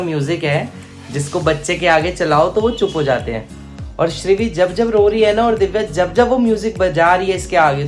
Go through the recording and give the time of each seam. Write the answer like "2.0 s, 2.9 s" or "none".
none